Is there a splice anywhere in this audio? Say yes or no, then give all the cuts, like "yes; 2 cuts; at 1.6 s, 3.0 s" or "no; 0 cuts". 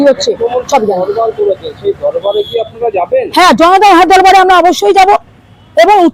no; 0 cuts